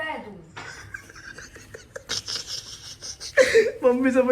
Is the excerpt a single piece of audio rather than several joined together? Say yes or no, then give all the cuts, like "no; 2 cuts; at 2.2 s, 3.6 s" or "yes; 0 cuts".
yes; 0 cuts